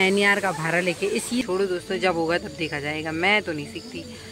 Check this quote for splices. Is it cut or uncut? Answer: cut